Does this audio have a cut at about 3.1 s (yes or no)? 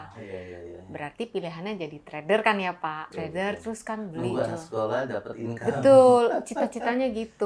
yes